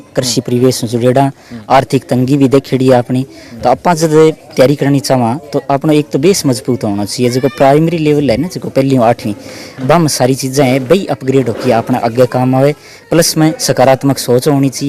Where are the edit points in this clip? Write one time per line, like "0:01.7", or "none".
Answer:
none